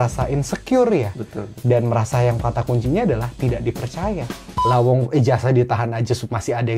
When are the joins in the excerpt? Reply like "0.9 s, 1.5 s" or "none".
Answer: 4.6 s